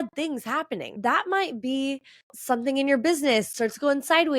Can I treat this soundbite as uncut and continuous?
no; 2 cuts; at 1.0 s, 3.5 s

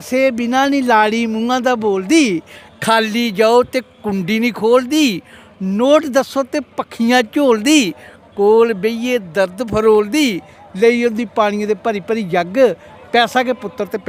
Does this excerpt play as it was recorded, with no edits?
yes; 0 cuts

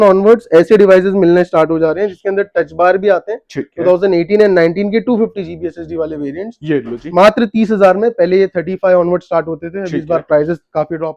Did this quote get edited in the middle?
no; 0 cuts

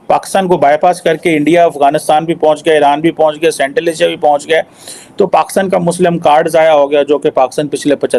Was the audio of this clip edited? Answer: no; 0 cuts

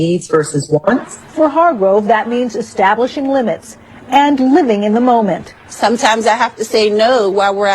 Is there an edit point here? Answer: yes; 1 cut; at 1.8 s

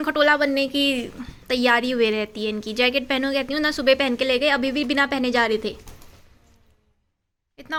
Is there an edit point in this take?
no; 0 cuts

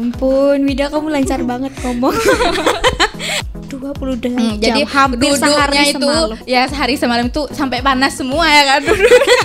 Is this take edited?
yes; 1 cut; at 3.4 s

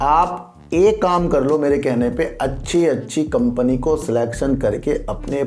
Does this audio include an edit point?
no; 0 cuts

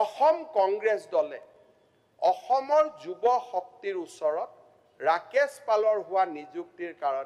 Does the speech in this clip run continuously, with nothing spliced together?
yes; 0 cuts

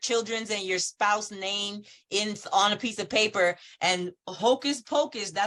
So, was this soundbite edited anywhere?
no; 0 cuts

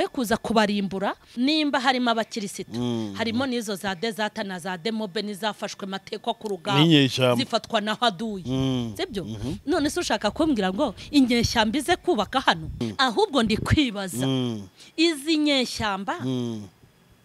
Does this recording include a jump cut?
yes; 2 cuts; at 1.2 s, 12.9 s

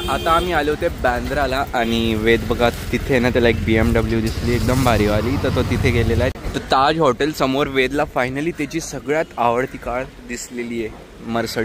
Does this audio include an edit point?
yes; 1 cut; at 6.3 s

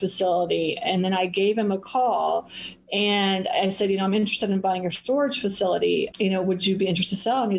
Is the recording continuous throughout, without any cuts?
no; 1 cut; at 6.1 s

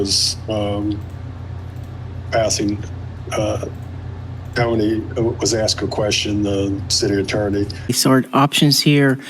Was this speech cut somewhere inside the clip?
yes; 1 cut; at 8.0 s

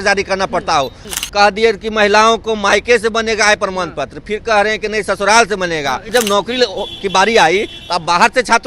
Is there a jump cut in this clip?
yes; 2 cuts; at 1.0 s, 6.1 s

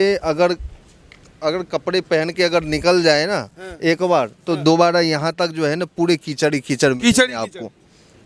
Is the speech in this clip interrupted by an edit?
no; 0 cuts

